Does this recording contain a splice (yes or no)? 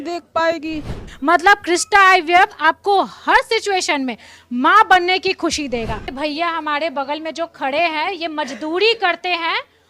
yes